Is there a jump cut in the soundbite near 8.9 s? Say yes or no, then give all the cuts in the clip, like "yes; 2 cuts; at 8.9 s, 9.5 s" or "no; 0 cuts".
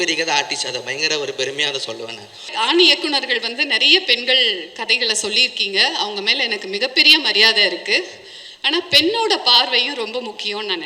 no; 1 cut; at 2.5 s